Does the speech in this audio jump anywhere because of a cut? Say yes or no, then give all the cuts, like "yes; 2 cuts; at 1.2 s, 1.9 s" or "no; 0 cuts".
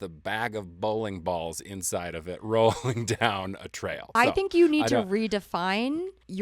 yes; 1 cut; at 4.0 s